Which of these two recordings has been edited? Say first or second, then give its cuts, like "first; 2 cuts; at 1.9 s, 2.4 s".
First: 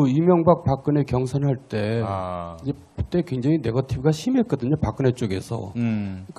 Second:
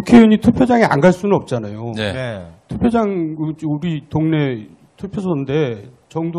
second; 1 cut; at 5.0 s